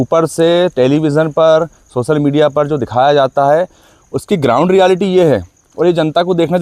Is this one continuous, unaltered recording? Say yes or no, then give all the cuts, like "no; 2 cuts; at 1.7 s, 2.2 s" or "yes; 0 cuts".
yes; 0 cuts